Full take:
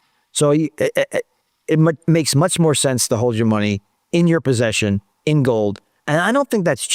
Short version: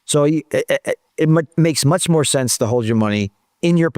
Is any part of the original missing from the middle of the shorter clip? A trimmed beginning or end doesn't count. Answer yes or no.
yes